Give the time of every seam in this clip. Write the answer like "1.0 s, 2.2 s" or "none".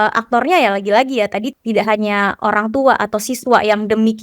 1.5 s